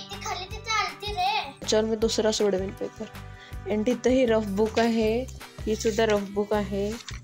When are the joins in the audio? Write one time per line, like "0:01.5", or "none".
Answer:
0:01.7